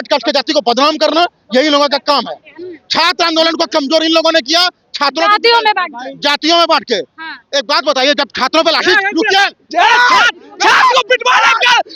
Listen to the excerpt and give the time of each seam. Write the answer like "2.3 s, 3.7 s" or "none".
none